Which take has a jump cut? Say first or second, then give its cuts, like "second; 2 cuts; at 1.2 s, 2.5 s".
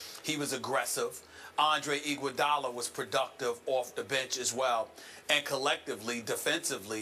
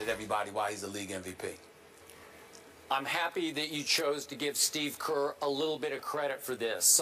first; 1 cut; at 4.4 s